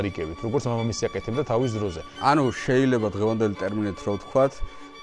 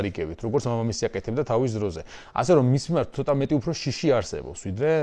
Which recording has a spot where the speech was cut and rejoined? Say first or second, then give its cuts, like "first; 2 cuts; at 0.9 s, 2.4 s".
first; 1 cut; at 2.0 s